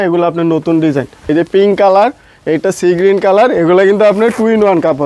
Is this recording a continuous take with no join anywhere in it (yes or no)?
no